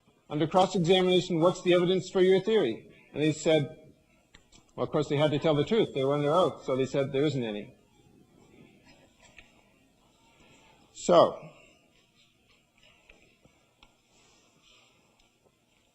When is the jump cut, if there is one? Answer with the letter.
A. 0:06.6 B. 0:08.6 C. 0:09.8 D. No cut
C